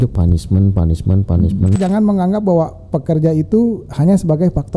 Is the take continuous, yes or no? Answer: no